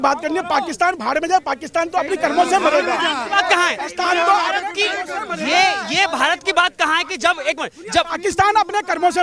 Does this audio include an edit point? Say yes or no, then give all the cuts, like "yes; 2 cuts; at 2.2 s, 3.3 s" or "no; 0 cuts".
no; 0 cuts